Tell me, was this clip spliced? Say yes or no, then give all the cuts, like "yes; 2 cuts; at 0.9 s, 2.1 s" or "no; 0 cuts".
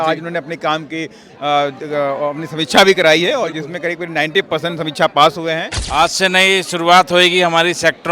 yes; 1 cut; at 5.7 s